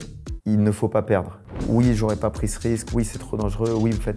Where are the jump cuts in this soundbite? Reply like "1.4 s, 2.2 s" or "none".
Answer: 1.4 s